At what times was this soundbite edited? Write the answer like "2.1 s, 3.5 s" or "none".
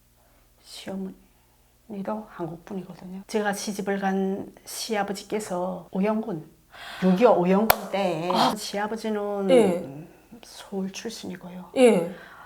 8.5 s